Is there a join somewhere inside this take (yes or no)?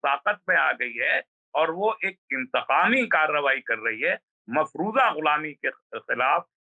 no